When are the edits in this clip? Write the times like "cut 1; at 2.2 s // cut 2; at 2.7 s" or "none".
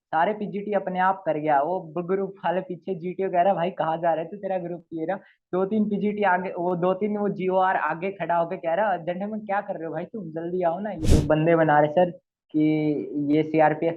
cut 1; at 11.0 s